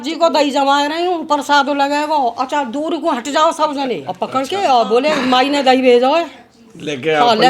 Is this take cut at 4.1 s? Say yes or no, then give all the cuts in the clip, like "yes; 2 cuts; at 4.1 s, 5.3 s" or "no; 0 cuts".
yes; 1 cut; at 4.1 s